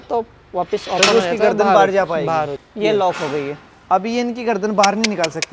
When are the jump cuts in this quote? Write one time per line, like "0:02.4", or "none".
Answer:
0:02.6